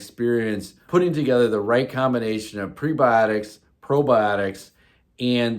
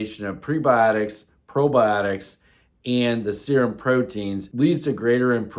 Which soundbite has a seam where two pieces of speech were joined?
second; 1 cut; at 4.4 s

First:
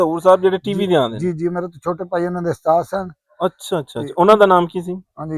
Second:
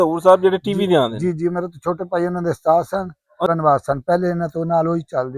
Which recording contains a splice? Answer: second; 1 cut; at 3.5 s

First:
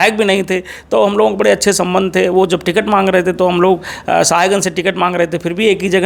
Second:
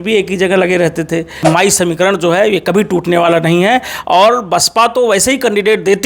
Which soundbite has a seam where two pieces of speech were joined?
second; 1 cut; at 1.4 s

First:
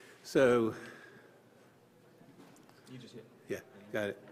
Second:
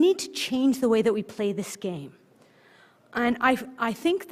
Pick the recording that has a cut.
second; 1 cut; at 2.6 s

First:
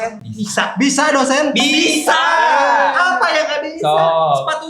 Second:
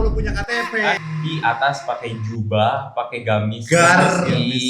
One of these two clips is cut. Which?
second; 1 cut; at 1.1 s

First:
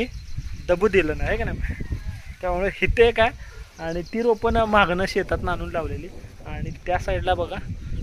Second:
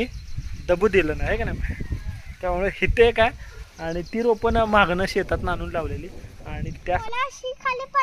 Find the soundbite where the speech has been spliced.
second; 1 cut; at 7.0 s

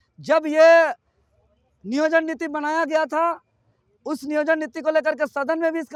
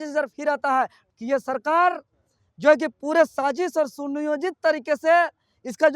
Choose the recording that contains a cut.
second; 1 cut; at 1.1 s

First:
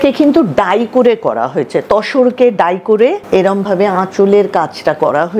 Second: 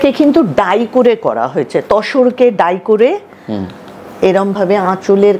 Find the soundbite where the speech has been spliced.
first; 1 cut; at 3.2 s

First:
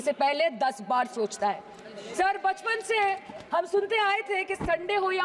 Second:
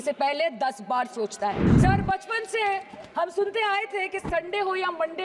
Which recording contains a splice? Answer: second; 1 cut; at 1.7 s

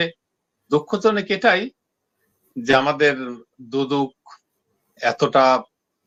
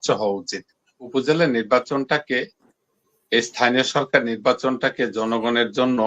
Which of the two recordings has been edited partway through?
second; 1 cut; at 1.0 s

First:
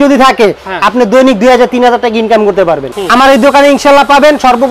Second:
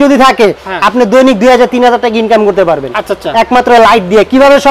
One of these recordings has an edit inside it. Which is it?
first; 1 cut; at 2.9 s

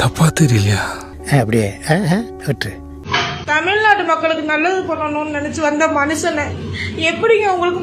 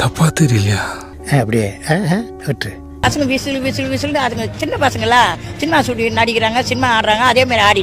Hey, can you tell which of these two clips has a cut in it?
first; 1 cut; at 2.8 s

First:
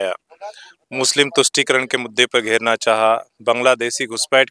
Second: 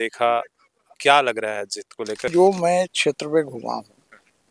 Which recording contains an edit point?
second; 1 cut; at 2.3 s

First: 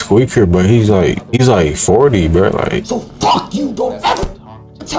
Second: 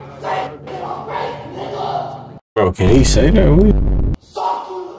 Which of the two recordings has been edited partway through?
first; 1 cut; at 2.9 s

